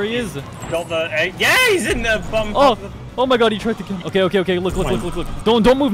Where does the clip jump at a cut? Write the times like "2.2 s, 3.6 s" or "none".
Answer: none